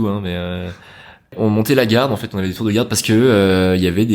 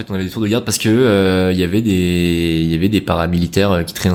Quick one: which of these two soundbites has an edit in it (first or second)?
first